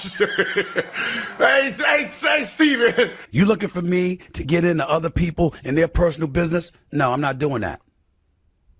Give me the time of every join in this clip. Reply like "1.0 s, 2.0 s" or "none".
3.2 s